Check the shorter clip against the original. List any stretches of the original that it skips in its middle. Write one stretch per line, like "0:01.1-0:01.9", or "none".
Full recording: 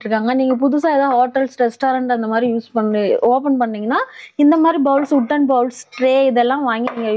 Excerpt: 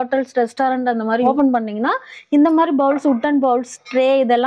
0:02.5-0:03.3